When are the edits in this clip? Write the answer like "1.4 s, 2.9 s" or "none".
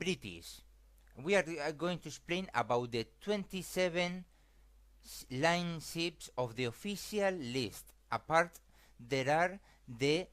4.3 s